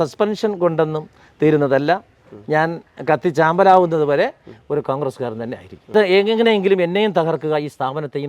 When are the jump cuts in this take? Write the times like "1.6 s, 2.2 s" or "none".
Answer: 5.9 s